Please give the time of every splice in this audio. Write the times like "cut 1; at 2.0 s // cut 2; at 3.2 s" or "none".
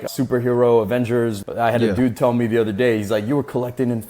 cut 1; at 1.4 s